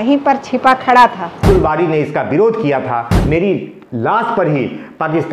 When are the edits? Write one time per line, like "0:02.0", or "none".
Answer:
0:01.4
0:03.1